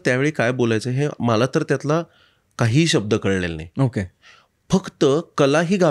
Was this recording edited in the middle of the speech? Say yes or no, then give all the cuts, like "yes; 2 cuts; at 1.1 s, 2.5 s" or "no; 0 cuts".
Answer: no; 0 cuts